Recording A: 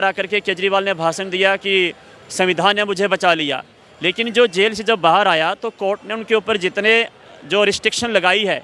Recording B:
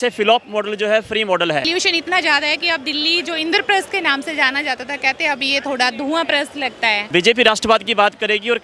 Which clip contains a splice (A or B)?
B